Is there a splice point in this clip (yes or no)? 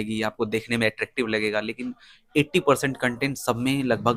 no